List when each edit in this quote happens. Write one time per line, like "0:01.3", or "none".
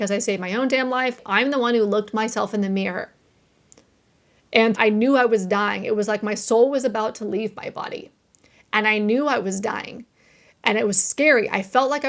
0:01.2
0:04.8